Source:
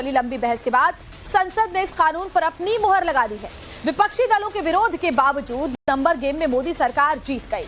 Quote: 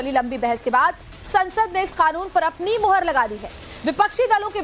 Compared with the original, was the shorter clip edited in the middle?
no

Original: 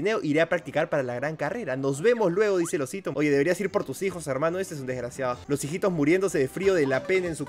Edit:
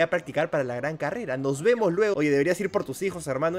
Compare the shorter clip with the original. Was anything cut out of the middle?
yes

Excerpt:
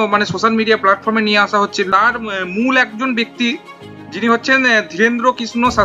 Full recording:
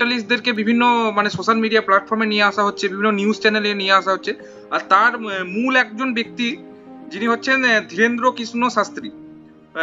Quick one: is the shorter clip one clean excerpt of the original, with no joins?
no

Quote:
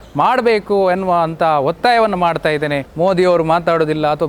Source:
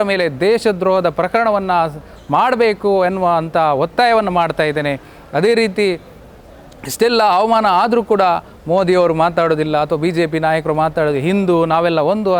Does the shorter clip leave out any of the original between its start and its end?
yes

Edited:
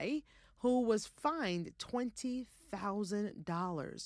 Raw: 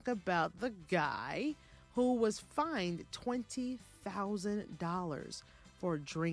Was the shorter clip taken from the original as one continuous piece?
yes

